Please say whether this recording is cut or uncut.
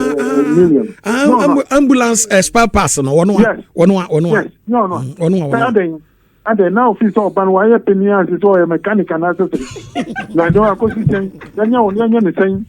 cut